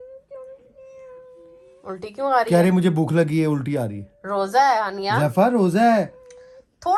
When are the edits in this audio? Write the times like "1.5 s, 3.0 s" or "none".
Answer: none